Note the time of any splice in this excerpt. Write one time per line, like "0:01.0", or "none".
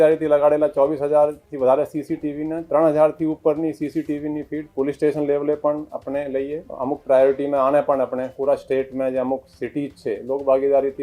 0:06.6